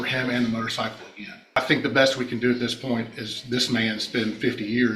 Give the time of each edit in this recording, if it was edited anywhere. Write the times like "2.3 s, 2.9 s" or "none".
1.6 s